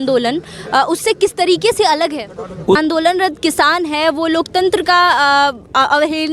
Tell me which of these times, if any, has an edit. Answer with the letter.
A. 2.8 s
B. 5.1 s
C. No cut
A